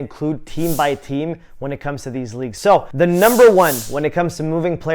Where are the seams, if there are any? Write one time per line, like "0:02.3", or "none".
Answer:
0:02.5